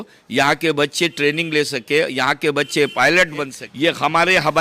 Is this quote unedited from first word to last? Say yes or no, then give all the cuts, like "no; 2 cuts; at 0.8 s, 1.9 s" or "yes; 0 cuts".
no; 1 cut; at 3.6 s